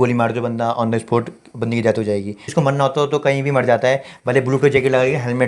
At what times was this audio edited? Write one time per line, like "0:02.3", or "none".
0:02.5